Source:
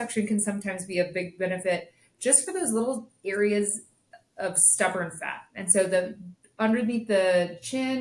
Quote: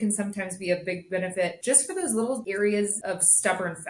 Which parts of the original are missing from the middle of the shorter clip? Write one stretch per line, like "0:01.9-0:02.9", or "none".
0:01.8-0:02.1
0:03.0-0:03.2
0:03.8-0:04.3